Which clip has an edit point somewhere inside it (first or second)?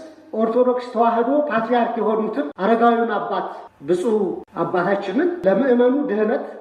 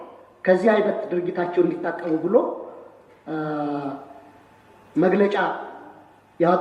first